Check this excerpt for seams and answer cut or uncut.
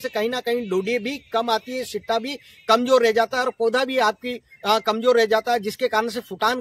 uncut